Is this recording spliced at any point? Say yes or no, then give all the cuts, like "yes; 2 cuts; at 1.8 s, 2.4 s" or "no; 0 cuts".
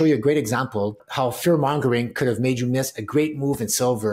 yes; 1 cut; at 1.0 s